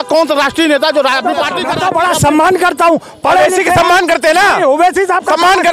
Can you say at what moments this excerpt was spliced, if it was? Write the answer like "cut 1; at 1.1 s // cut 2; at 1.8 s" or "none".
cut 1; at 1.6 s